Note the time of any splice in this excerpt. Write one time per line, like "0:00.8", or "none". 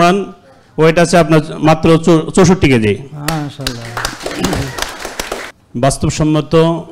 0:05.4